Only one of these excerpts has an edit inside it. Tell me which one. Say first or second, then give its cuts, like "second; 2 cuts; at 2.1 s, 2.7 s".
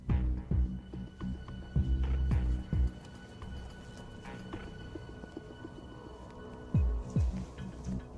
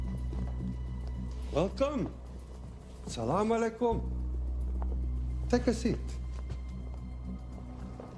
second; 1 cut; at 6.4 s